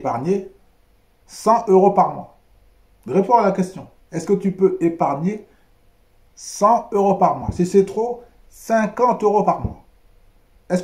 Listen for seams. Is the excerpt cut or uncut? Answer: uncut